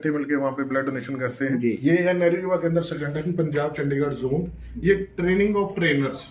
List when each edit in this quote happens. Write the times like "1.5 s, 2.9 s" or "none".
1.8 s